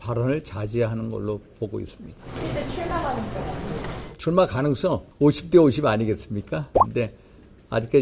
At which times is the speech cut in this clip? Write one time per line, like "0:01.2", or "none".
0:02.2
0:05.1
0:06.8